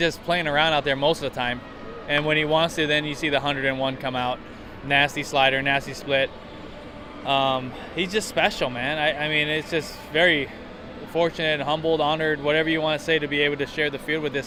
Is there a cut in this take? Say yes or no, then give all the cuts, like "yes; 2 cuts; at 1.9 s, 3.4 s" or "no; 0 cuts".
no; 0 cuts